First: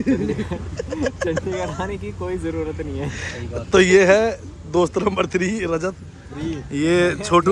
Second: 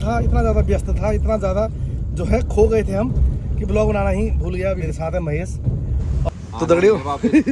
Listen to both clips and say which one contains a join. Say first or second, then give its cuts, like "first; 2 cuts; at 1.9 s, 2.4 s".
second; 2 cuts; at 4.8 s, 6.3 s